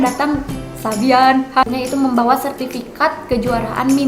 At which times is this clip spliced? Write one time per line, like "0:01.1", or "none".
0:01.7